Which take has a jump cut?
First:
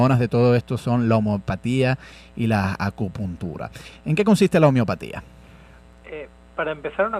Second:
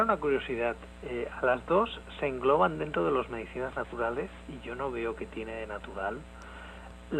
first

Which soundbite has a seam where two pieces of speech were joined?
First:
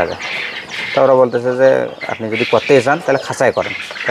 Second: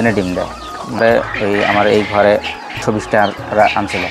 second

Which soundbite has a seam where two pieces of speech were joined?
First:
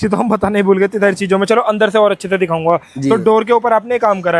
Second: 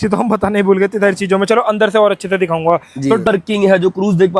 second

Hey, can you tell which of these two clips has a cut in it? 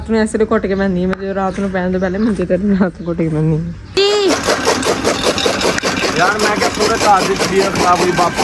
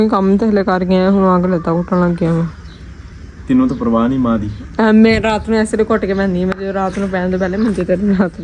first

